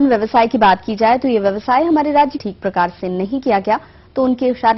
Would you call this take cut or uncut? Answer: uncut